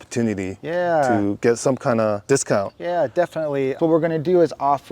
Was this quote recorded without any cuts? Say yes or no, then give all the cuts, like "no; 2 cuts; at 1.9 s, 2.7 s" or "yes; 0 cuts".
no; 3 cuts; at 1.4 s, 2.2 s, 3.8 s